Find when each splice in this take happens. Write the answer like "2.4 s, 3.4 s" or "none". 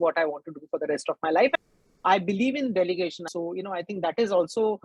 2.0 s, 3.2 s